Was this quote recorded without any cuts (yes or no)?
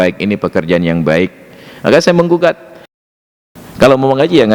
no